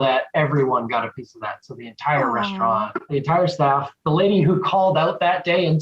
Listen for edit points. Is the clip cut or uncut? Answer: cut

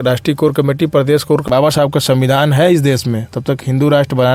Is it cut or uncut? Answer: cut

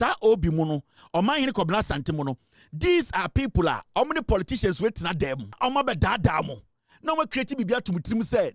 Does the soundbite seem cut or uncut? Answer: cut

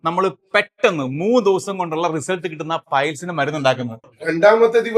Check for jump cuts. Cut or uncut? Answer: cut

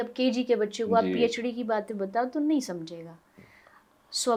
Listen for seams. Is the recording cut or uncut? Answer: uncut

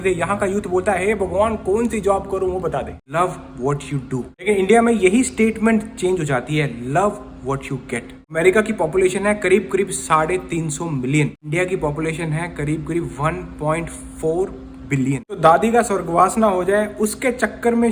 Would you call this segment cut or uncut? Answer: cut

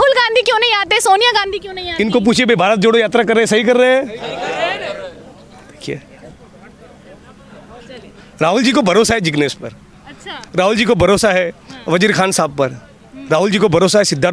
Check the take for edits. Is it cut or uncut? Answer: uncut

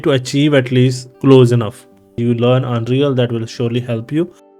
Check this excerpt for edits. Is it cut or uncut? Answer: cut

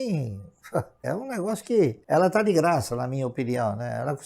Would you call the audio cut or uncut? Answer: cut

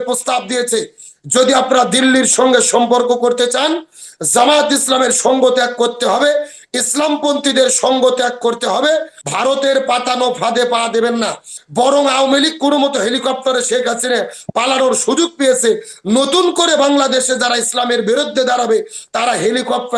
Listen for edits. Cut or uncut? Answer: cut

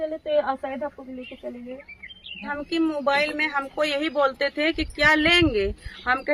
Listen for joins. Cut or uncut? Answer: cut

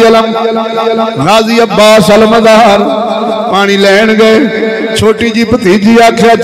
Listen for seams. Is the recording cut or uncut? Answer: uncut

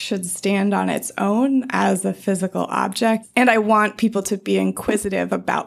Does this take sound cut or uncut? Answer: cut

